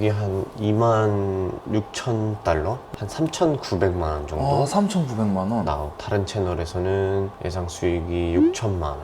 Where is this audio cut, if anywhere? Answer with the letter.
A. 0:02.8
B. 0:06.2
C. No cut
A